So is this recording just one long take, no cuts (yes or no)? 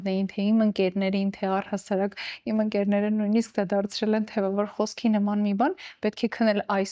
yes